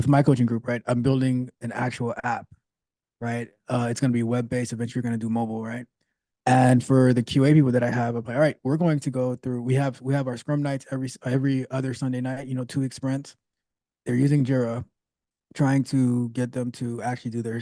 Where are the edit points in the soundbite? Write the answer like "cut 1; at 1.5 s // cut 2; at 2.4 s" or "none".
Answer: none

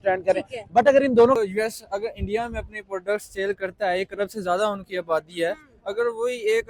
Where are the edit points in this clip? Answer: cut 1; at 1.4 s

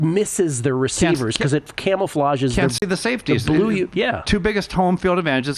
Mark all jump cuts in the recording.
none

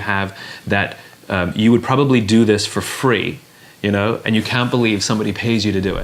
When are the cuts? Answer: none

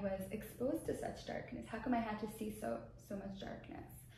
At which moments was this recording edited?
none

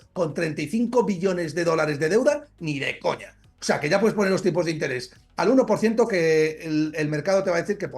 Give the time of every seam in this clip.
none

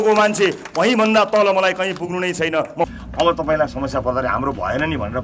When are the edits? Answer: cut 1; at 2.8 s

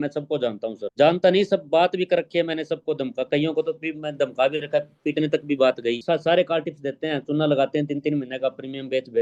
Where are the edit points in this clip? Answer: cut 1; at 6.0 s

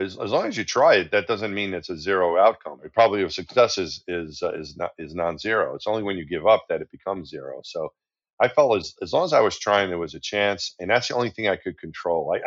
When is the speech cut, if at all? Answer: cut 1; at 2.9 s

